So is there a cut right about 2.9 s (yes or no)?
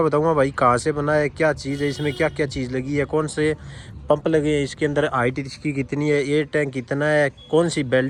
no